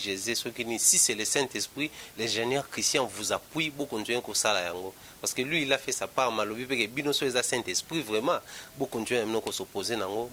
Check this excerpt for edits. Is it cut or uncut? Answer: uncut